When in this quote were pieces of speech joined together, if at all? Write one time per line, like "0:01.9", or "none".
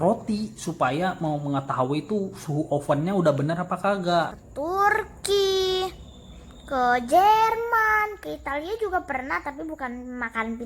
0:04.4